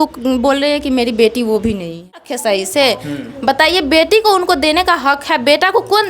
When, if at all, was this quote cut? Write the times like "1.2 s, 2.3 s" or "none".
2.3 s